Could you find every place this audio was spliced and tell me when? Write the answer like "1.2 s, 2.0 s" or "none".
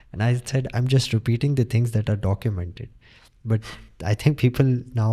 3.9 s